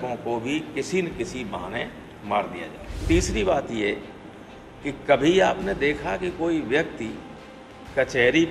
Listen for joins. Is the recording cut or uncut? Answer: cut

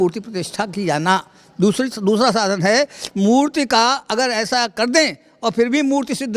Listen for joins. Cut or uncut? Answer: uncut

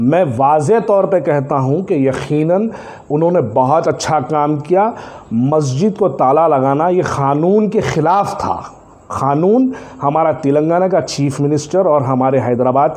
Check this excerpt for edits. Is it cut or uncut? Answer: uncut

